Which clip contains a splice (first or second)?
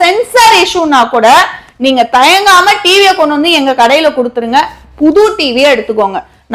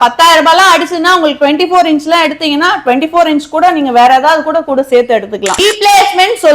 second